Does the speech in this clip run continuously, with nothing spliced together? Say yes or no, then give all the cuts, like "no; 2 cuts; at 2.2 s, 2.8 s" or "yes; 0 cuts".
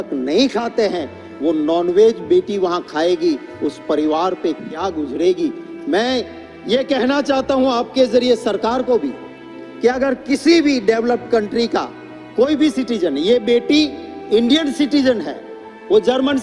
yes; 0 cuts